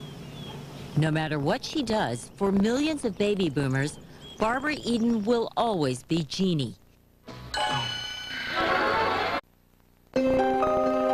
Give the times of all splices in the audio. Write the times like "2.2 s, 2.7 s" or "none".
none